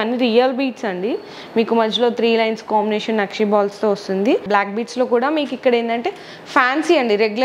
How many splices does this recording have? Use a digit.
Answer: 1